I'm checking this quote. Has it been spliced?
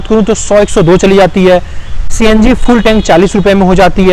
no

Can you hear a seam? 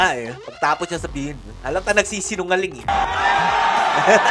no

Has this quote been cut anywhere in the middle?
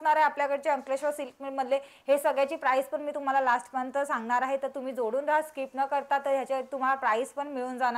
no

